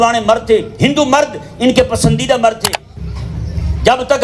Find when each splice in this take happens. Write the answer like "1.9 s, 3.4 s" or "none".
3.0 s